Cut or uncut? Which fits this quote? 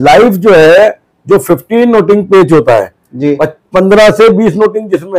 uncut